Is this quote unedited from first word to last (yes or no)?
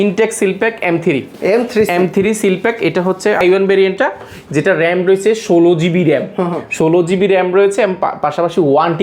yes